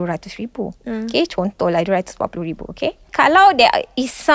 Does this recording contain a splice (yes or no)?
yes